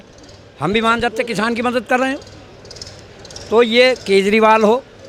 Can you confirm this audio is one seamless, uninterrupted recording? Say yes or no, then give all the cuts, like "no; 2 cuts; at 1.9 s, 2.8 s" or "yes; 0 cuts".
yes; 0 cuts